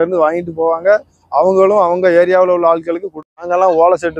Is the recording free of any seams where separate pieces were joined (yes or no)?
no